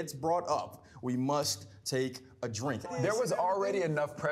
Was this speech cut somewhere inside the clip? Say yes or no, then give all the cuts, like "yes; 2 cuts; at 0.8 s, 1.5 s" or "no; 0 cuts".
yes; 1 cut; at 2.9 s